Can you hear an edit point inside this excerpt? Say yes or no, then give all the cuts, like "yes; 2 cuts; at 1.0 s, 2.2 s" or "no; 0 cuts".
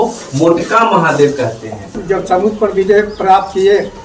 yes; 1 cut; at 2.0 s